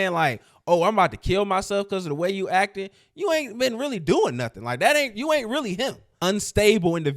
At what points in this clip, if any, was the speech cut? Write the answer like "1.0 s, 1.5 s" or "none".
6.0 s

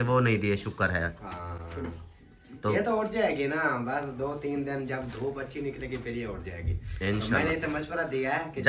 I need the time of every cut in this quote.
none

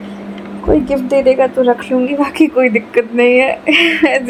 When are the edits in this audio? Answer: none

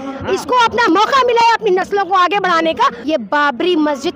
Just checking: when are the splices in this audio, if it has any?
3.0 s

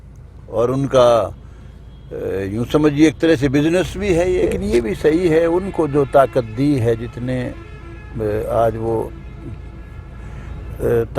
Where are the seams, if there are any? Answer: 4.5 s

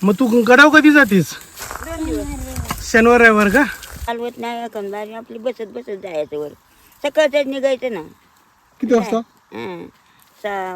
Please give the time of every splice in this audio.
4.1 s

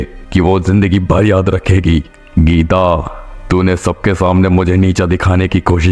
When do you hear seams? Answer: none

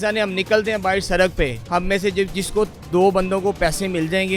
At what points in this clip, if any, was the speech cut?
1.6 s, 2.8 s

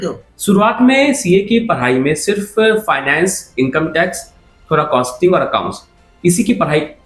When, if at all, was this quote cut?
none

